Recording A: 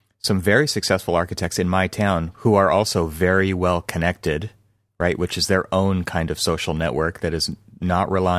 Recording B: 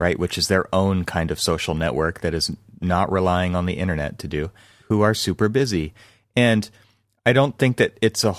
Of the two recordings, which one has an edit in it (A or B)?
B